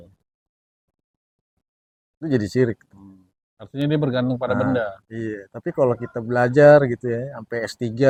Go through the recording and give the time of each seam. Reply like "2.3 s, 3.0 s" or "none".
none